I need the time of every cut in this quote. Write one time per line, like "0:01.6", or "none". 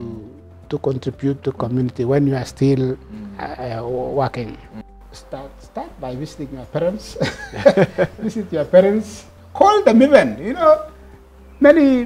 0:04.7